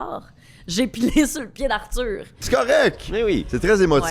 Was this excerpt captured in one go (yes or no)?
no